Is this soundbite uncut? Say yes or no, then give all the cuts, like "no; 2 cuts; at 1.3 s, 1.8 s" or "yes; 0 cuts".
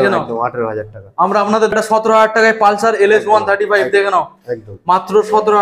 no; 1 cut; at 1.7 s